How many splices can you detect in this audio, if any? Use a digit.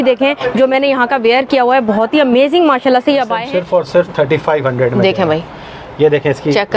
1